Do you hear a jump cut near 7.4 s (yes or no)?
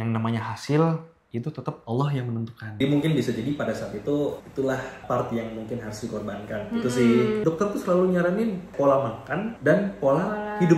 yes